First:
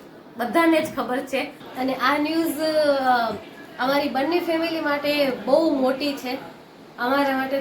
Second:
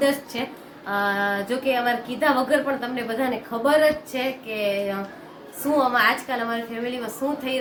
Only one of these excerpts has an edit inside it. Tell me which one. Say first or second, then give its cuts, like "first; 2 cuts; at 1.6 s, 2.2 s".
first; 1 cut; at 1.6 s